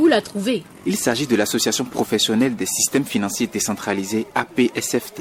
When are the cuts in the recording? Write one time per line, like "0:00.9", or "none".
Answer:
none